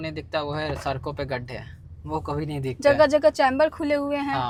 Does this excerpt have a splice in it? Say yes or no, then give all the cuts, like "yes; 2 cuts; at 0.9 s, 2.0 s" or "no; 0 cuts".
no; 0 cuts